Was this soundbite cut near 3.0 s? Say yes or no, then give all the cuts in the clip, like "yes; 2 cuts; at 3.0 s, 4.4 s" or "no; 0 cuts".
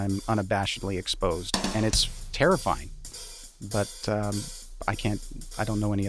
yes; 1 cut; at 3.0 s